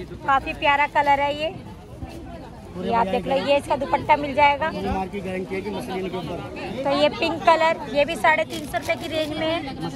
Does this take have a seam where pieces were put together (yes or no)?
no